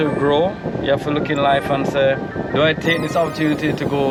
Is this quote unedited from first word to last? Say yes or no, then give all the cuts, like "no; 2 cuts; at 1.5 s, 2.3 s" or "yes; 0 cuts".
yes; 0 cuts